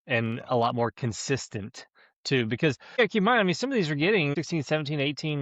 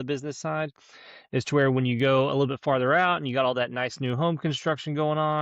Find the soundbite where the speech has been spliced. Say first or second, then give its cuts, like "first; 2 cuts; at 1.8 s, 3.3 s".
first; 2 cuts; at 3.0 s, 4.3 s